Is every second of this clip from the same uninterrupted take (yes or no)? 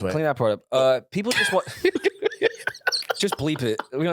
yes